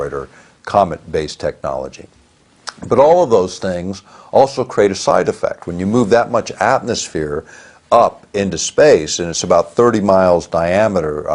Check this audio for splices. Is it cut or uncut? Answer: uncut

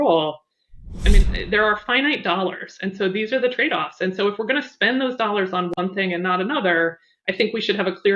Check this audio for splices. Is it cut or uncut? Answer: cut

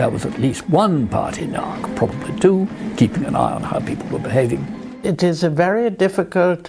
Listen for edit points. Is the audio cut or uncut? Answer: uncut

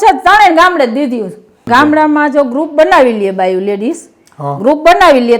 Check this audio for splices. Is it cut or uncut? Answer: cut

